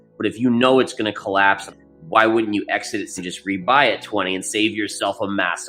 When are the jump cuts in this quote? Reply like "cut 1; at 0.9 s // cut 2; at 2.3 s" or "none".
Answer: cut 1; at 1.8 s // cut 2; at 3.2 s